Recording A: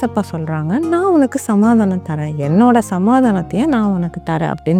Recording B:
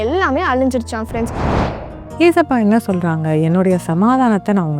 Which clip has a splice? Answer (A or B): B